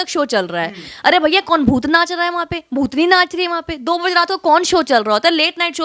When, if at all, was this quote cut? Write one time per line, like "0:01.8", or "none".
none